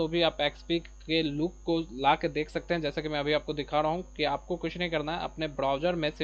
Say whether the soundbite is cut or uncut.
uncut